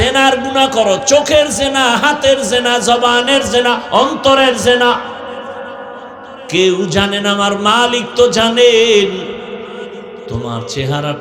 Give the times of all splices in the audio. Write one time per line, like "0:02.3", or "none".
none